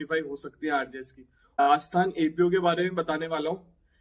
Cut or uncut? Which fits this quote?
cut